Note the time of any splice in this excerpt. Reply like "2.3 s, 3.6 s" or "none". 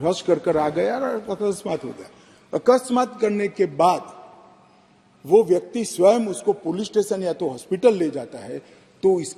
none